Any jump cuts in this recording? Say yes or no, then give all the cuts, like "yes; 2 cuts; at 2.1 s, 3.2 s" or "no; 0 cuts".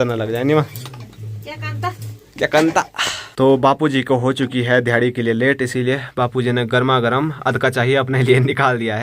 no; 0 cuts